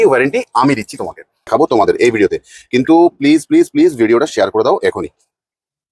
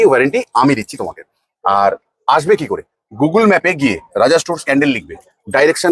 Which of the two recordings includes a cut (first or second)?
first